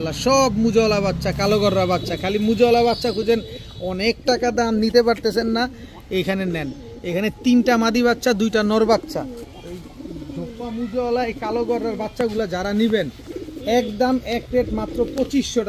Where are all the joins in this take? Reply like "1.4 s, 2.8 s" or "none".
none